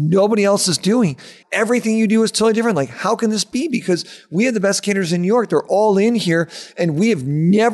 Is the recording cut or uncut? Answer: cut